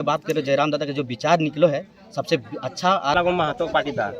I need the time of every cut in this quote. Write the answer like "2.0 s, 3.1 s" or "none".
3.1 s